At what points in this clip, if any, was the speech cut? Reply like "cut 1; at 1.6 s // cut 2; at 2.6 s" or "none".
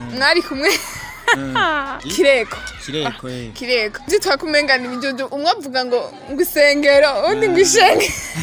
cut 1; at 2.0 s // cut 2; at 4.1 s